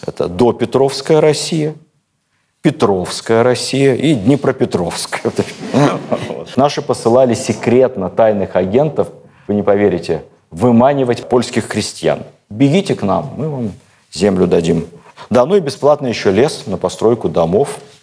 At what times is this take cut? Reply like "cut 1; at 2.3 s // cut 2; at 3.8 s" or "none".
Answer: cut 1; at 6.4 s // cut 2; at 12.4 s // cut 3; at 15.0 s

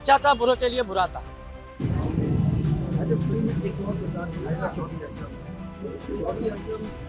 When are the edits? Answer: none

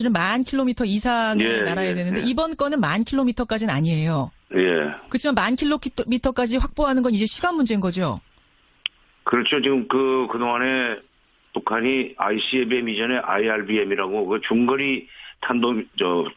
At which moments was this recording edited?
none

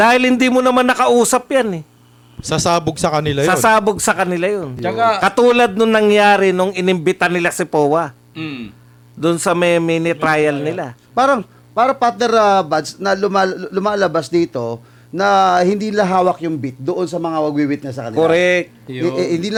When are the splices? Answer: none

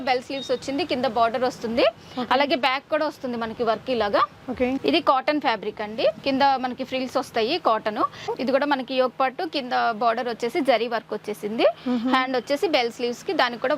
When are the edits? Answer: cut 1; at 4.8 s // cut 2; at 8.3 s

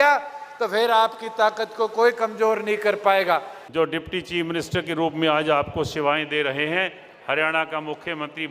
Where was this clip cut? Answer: cut 1; at 3.6 s

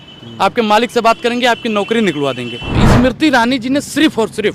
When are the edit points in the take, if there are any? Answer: cut 1; at 2.7 s

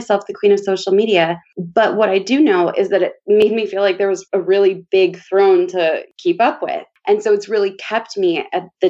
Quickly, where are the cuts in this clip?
cut 1; at 4.3 s // cut 2; at 6.0 s

